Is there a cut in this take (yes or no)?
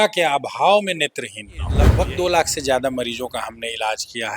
yes